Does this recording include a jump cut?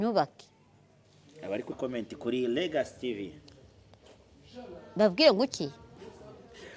yes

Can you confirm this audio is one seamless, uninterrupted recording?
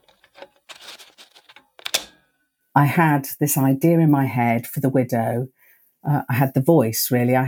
no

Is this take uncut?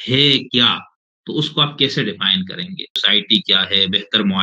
no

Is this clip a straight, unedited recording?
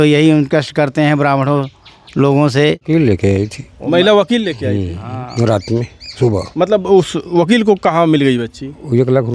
no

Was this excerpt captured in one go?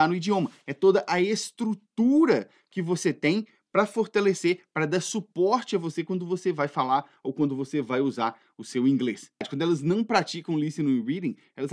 no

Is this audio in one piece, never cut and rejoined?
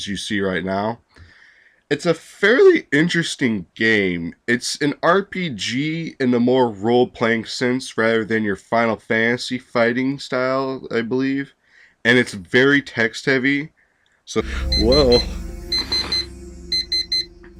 yes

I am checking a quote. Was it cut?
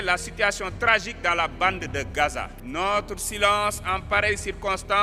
yes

